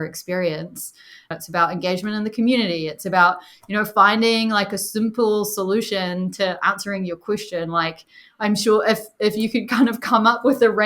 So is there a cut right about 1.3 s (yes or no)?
yes